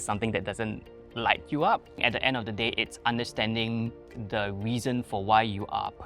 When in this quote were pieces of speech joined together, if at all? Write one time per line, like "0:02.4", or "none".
0:02.0